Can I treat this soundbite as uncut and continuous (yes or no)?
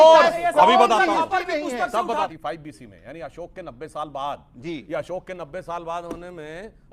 no